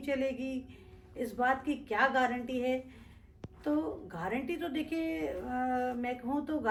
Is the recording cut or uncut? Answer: uncut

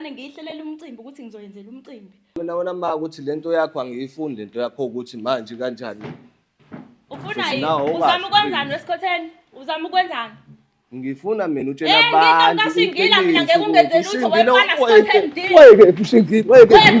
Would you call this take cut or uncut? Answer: cut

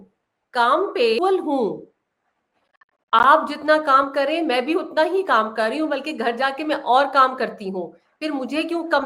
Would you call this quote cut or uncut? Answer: cut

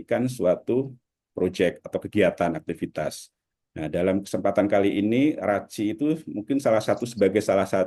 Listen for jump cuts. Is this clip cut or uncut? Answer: uncut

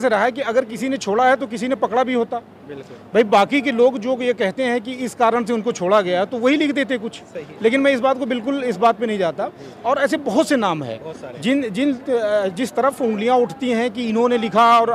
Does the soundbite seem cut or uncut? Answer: uncut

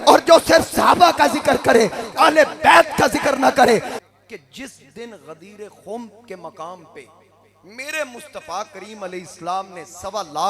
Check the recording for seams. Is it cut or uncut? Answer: cut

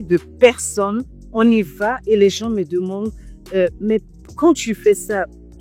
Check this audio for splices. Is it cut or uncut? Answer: uncut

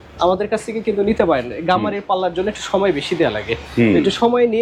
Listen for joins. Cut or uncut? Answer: uncut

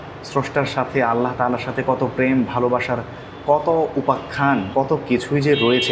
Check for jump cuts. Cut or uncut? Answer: cut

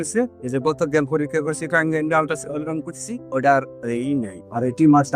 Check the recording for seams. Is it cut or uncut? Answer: uncut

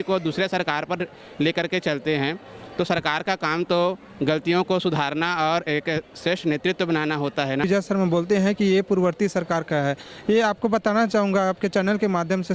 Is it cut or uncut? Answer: cut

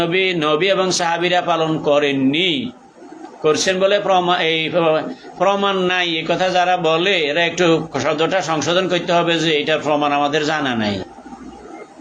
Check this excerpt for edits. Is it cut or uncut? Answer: uncut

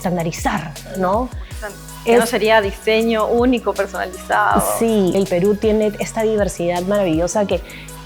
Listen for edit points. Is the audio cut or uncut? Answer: cut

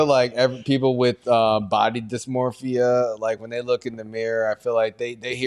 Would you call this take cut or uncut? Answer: uncut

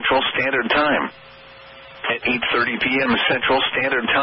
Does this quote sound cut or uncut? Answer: cut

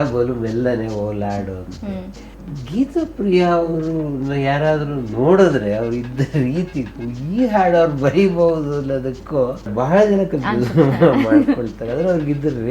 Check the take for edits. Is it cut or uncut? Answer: cut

